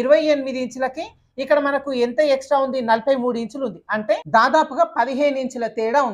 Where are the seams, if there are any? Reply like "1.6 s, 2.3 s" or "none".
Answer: 4.2 s

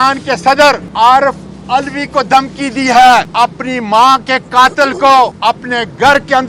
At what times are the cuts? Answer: 0.9 s, 3.3 s, 5.4 s

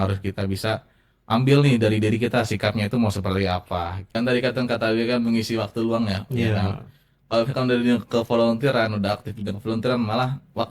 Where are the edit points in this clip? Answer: 4.0 s

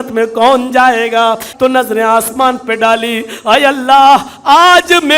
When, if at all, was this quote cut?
1.5 s

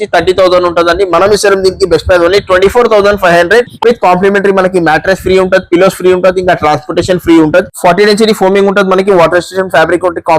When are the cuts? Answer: 7.7 s

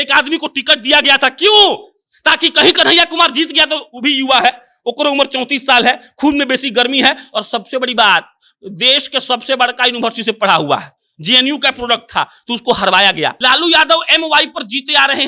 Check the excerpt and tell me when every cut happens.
13.4 s

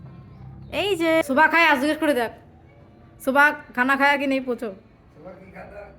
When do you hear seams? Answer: 1.2 s

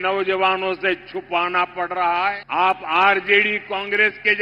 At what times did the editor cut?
2.4 s

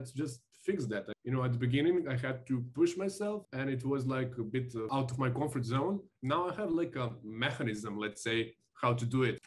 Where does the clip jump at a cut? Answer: 1.1 s, 3.5 s, 4.9 s, 6.1 s

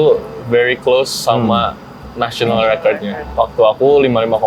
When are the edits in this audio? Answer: 3.2 s

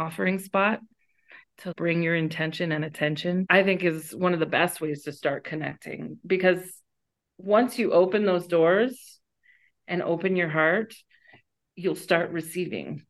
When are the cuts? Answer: 3.5 s

